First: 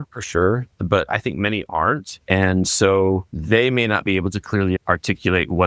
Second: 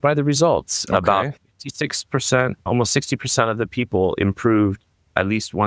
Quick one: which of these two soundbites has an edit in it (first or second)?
first